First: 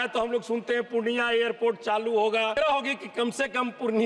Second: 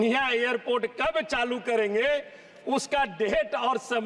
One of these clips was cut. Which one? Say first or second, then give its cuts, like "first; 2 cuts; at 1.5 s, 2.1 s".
first; 1 cut; at 2.5 s